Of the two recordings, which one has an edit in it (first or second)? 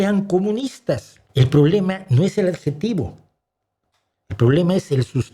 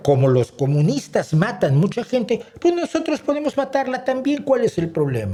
first